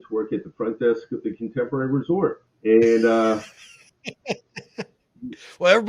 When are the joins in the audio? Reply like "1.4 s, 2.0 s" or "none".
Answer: 2.5 s